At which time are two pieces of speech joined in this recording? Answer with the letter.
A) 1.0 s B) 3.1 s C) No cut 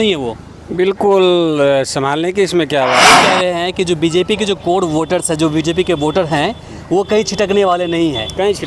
B